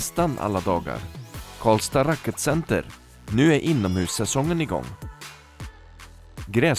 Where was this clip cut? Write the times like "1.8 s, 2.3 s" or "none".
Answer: none